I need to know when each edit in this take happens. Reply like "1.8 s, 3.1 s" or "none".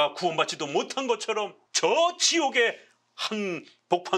1.6 s